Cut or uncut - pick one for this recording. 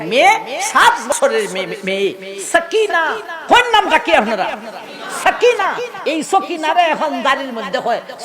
cut